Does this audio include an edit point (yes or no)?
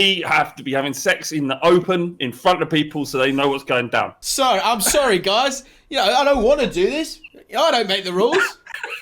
yes